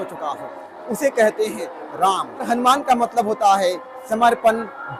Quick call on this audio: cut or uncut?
cut